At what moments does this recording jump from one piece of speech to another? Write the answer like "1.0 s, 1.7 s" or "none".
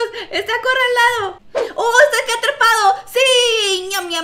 1.4 s